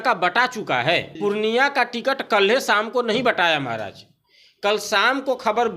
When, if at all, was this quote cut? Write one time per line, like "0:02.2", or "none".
0:01.1